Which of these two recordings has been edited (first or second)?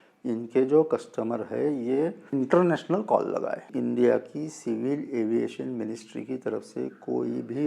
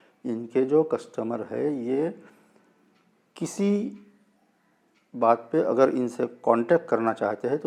first